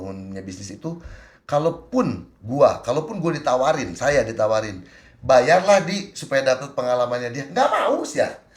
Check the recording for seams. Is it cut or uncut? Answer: uncut